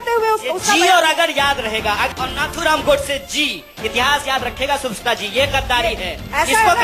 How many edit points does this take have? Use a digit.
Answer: 1